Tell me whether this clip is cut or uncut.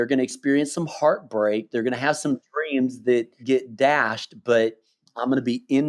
cut